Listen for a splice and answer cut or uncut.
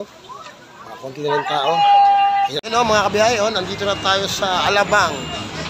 cut